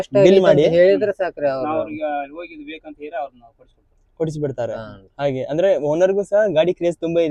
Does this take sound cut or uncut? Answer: uncut